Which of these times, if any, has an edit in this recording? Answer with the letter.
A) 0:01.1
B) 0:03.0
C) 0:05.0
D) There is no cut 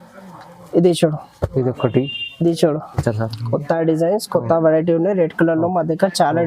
B